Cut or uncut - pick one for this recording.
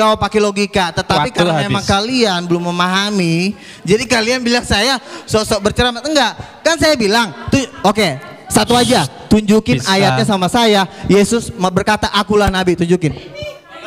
uncut